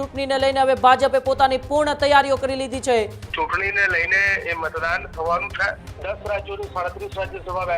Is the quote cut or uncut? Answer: cut